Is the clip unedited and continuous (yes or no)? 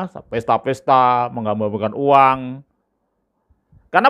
yes